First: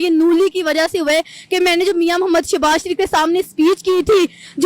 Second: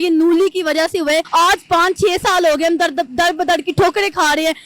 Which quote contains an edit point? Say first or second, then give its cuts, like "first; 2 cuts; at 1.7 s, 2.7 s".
second; 1 cut; at 1.3 s